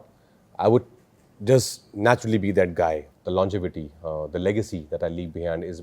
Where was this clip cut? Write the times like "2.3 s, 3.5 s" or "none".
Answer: 3.1 s